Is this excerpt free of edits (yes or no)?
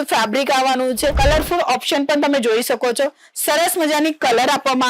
no